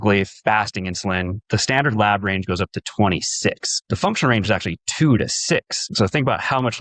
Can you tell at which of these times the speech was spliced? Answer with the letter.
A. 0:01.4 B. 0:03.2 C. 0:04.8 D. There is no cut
A